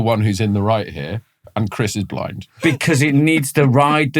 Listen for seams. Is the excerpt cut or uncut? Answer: cut